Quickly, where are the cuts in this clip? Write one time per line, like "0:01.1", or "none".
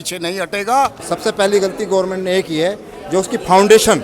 0:01.1